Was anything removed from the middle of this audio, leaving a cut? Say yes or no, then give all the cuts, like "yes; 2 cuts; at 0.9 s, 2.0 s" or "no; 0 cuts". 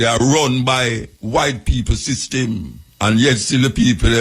yes; 2 cuts; at 1.1 s, 2.8 s